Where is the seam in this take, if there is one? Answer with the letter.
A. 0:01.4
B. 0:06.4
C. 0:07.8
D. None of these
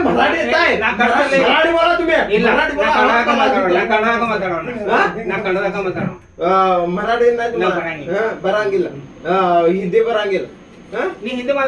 D